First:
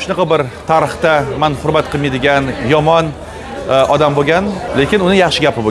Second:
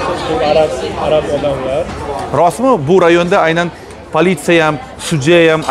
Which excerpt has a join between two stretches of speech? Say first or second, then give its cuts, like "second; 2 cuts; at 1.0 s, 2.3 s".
first; 1 cut; at 4.6 s